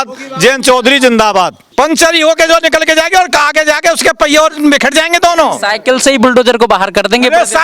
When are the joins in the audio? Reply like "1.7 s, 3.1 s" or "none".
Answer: 1.6 s

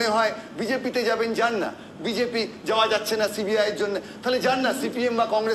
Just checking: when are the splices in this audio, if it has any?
none

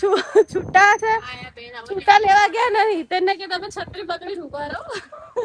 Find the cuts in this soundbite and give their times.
none

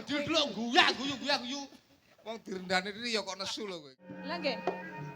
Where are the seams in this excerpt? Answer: 4.2 s

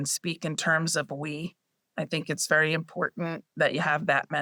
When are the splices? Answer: none

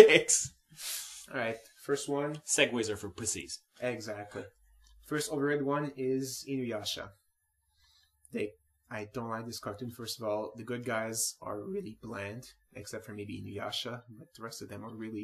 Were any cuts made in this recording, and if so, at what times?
5.5 s

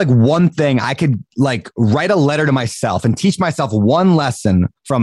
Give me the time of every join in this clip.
none

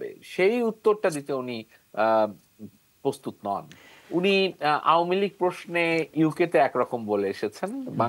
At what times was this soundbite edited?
none

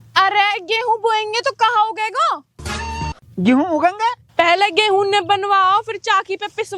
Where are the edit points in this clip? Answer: 4.3 s

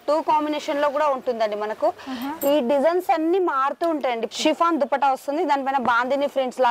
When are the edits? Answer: 4.3 s

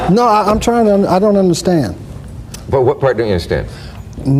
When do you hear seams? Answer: none

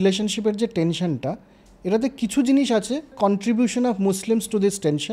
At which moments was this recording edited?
3.1 s

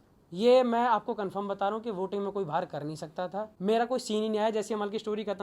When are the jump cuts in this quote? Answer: 3.5 s

